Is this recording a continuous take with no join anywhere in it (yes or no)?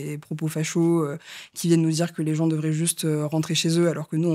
yes